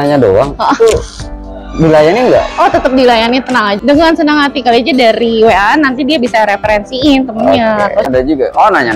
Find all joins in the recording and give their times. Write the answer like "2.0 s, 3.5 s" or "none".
4.0 s, 8.1 s